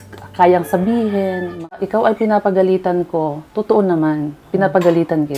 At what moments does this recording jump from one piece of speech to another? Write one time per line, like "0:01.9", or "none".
0:01.8